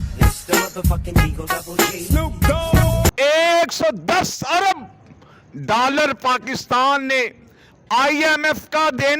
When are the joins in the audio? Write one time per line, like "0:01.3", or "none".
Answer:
0:03.1